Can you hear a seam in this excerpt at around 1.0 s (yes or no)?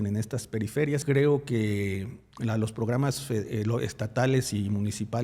yes